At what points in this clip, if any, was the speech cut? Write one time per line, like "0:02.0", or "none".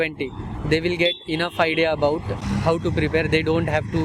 0:02.4